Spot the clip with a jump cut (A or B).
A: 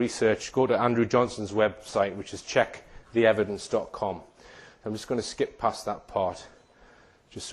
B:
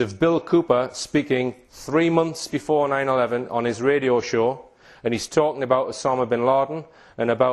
A